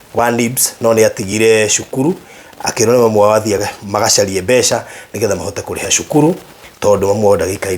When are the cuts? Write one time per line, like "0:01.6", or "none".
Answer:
none